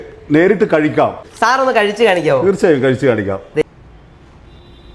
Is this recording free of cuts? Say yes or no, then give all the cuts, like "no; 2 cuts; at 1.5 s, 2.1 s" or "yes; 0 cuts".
no; 2 cuts; at 1.2 s, 3.6 s